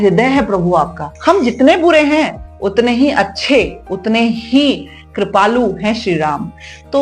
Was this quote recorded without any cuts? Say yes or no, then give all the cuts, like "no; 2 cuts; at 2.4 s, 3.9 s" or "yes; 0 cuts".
no; 1 cut; at 1.0 s